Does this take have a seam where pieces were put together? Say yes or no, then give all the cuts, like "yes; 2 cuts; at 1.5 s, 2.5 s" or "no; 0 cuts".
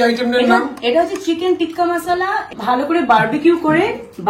no; 0 cuts